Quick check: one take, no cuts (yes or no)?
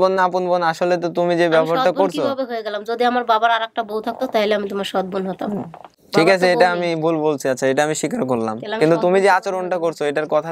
yes